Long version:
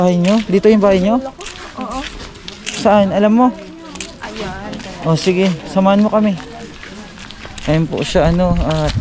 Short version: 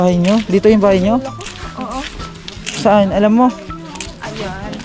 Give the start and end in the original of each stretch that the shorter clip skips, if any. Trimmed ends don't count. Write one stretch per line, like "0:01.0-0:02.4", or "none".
none